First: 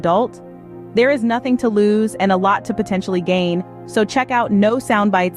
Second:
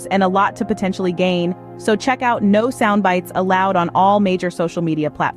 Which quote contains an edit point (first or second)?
second